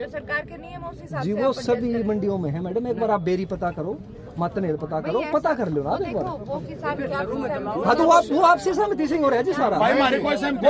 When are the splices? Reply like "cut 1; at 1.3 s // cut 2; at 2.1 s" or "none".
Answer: none